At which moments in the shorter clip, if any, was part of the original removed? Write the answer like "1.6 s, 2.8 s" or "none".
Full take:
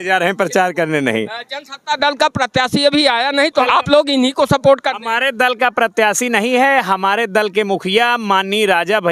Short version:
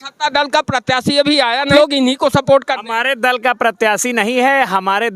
1.7 s